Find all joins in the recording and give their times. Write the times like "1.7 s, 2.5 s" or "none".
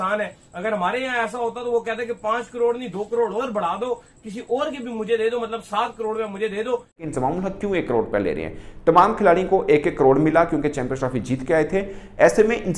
7.0 s